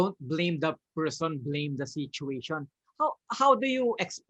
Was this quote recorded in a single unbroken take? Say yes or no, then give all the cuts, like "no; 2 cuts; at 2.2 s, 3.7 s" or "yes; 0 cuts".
yes; 0 cuts